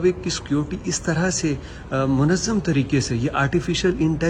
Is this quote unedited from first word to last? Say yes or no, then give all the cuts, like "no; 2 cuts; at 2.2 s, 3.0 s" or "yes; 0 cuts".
yes; 0 cuts